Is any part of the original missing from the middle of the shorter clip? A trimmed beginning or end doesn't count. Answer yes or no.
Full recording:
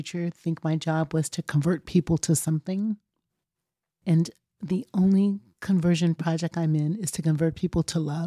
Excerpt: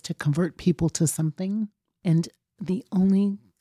yes